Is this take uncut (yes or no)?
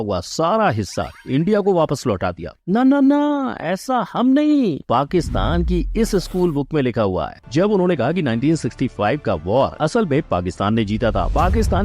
no